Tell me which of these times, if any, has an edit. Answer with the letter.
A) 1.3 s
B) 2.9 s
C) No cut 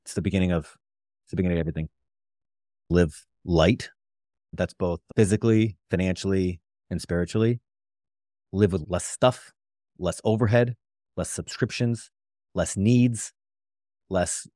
B